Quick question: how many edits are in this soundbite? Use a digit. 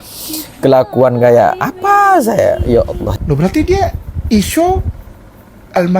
1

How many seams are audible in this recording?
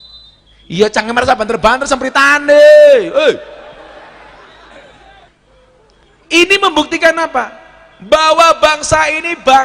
1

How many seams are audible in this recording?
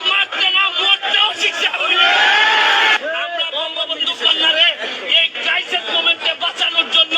1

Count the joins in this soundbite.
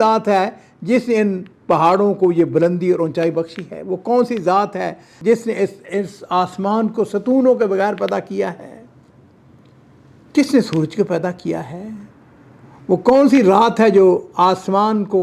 0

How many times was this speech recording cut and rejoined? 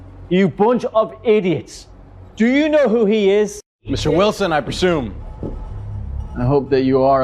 1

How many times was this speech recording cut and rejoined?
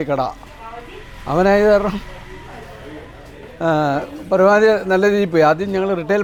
0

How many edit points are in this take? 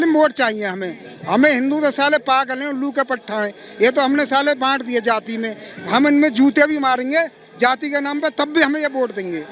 0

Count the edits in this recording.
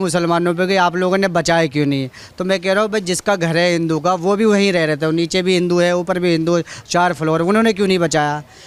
0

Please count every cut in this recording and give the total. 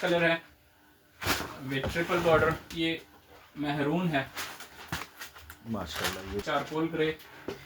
2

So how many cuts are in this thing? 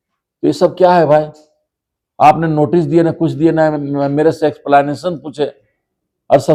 0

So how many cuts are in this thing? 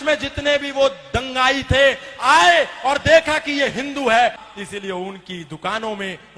1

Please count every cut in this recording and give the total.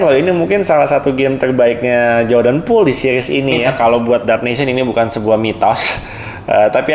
1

